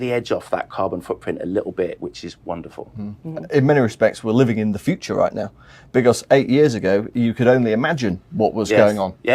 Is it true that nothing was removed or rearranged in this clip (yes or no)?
yes